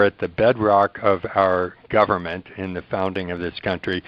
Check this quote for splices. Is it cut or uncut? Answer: uncut